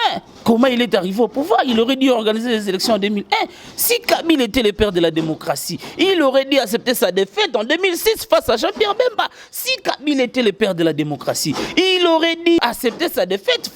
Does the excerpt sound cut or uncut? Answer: cut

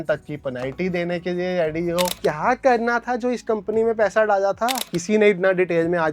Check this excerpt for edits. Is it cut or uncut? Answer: cut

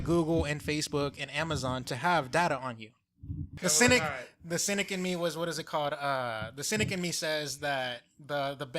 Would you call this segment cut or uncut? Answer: cut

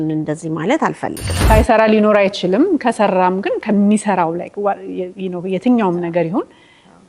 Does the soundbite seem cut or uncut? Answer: cut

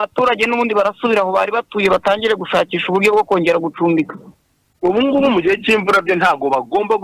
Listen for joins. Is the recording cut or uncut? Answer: uncut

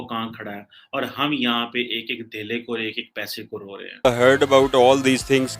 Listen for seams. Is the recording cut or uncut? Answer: cut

